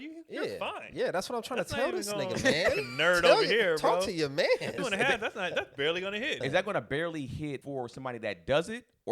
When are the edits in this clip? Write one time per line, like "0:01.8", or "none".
0:04.8
0:06.4
0:07.6